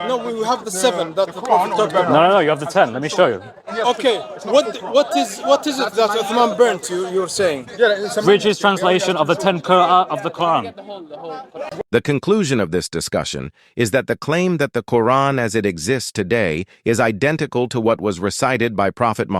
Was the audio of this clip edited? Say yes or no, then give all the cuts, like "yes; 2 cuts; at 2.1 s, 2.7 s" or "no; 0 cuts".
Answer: yes; 1 cut; at 11.8 s